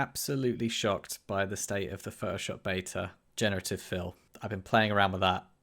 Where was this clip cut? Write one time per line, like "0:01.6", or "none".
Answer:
0:03.2
0:04.5